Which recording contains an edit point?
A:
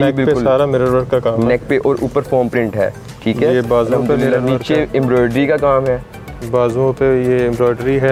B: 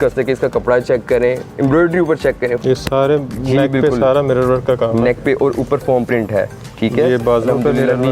B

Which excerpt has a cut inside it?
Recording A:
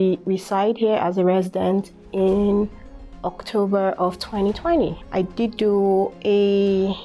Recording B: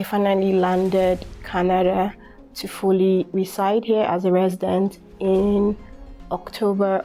A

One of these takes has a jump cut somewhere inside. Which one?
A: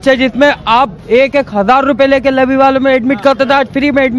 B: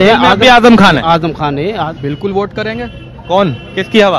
B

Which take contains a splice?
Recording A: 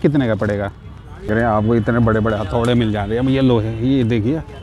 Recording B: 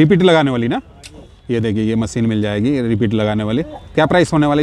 A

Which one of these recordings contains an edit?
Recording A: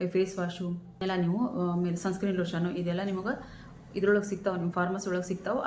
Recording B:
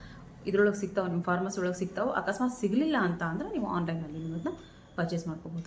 A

